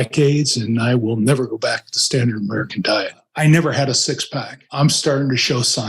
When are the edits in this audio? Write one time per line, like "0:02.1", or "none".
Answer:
0:03.2
0:04.7